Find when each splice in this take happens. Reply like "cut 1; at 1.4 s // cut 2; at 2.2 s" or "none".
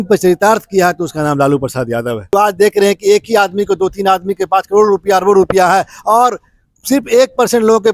cut 1; at 2.2 s